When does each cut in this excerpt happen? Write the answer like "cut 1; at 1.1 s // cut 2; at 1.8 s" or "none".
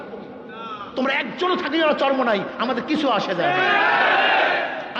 none